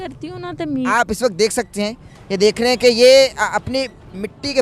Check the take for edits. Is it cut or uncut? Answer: cut